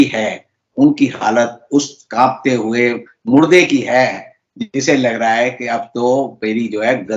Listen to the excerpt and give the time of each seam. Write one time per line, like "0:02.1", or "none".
none